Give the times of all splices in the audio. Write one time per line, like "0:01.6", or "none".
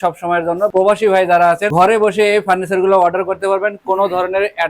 0:01.7